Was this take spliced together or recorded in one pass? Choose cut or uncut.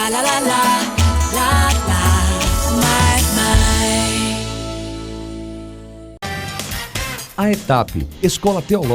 cut